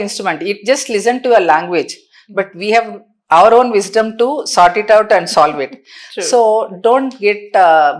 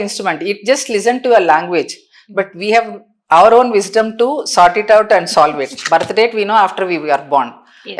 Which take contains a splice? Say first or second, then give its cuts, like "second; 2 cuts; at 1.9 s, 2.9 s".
second; 1 cut; at 5.7 s